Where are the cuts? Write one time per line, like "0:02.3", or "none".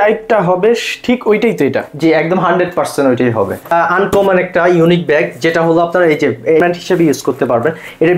0:03.7
0:06.6